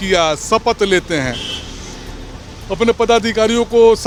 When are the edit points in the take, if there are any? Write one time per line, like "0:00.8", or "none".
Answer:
none